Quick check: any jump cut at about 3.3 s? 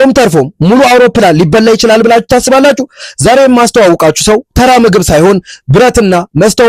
no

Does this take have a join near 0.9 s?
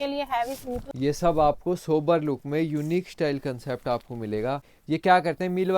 yes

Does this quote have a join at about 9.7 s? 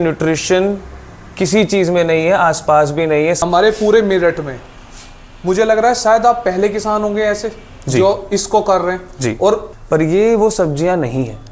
yes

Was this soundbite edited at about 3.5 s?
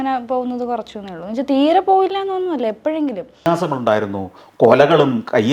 yes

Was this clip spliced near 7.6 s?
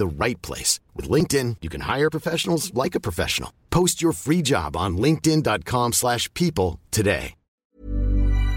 yes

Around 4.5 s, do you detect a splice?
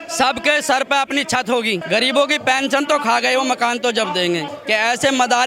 yes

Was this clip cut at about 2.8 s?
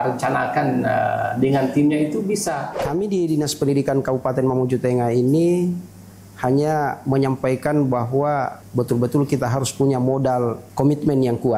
yes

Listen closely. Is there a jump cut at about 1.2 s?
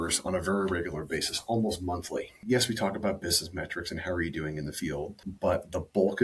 no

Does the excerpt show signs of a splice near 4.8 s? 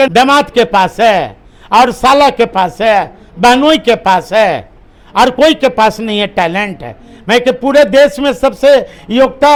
no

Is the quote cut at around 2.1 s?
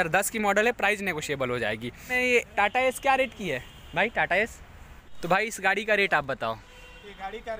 yes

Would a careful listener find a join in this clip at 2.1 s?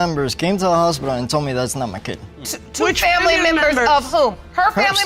no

